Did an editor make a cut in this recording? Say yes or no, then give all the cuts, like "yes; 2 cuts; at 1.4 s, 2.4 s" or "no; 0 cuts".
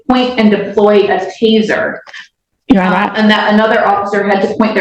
no; 0 cuts